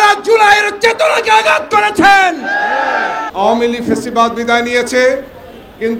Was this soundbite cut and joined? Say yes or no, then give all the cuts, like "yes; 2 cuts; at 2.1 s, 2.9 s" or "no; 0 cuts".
yes; 1 cut; at 3.2 s